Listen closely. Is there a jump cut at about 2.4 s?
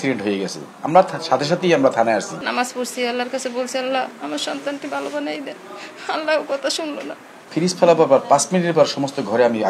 yes; 2 cuts; at 2.4 s, 7.4 s

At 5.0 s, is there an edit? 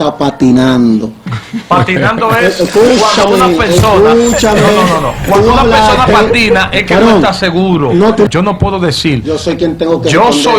no; 1 cut; at 8.3 s

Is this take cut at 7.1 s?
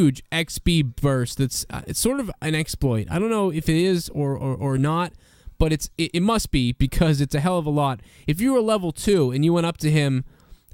no; 1 cut; at 4.4 s

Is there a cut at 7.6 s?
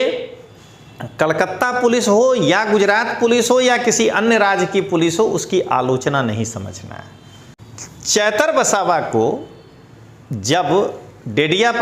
yes; 1 cut; at 7.6 s

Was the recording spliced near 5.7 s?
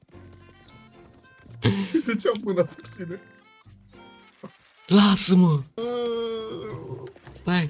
yes; 1 cut; at 5.7 s

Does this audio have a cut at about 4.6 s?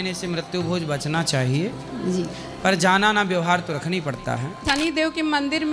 yes; 1 cut; at 4.6 s

